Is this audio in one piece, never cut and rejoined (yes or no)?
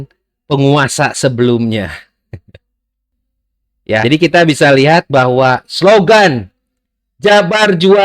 no